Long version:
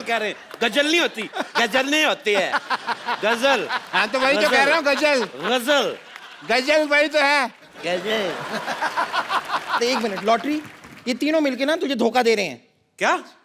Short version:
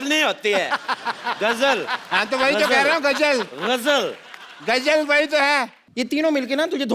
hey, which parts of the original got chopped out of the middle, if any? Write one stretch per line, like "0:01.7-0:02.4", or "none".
0:07.6-0:10.9